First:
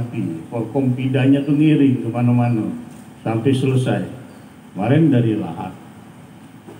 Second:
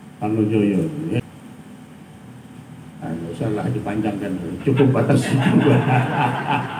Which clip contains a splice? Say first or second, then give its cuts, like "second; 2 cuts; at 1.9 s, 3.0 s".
second; 1 cut; at 1.2 s